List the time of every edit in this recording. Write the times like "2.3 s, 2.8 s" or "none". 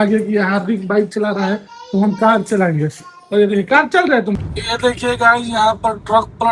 4.4 s

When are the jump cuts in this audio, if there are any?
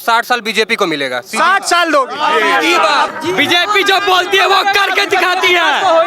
3.1 s

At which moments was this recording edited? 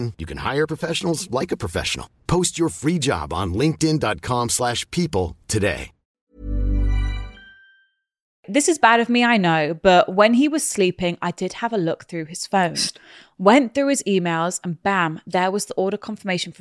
8.5 s

